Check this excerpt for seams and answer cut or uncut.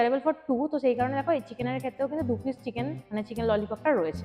uncut